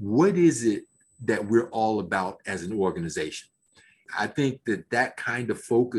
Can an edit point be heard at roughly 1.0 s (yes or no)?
no